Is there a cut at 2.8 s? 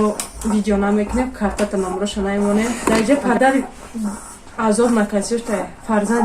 yes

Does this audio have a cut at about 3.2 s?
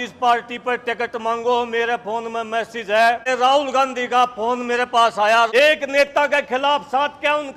yes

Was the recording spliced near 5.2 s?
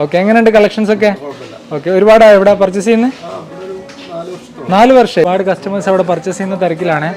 yes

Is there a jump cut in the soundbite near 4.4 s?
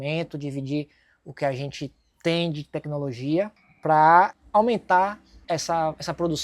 yes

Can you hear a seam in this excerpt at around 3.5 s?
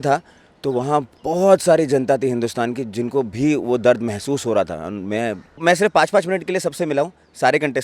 no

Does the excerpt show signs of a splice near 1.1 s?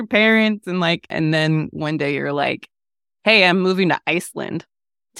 yes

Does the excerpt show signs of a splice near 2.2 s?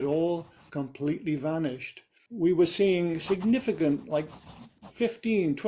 yes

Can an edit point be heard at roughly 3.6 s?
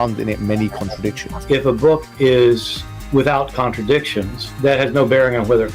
no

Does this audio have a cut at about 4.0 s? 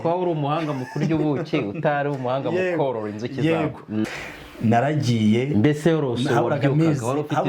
yes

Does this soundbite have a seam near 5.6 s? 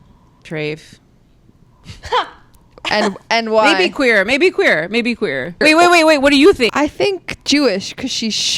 yes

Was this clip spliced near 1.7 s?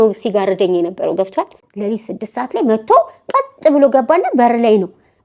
yes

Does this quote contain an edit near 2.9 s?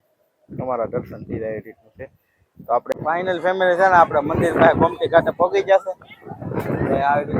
yes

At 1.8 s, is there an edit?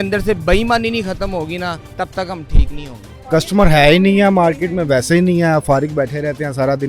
yes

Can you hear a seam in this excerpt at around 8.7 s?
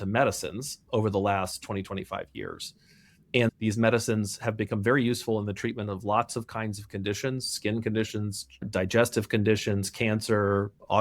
yes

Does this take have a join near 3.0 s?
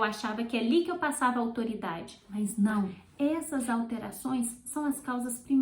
yes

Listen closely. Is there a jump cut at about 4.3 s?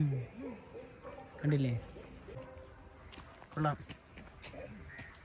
no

